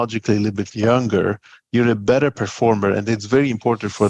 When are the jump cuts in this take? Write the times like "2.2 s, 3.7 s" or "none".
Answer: none